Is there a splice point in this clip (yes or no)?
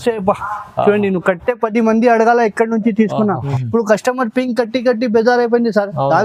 yes